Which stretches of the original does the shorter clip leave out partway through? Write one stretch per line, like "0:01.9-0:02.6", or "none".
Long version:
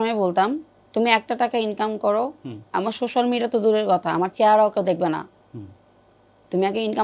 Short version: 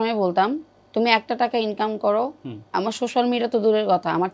none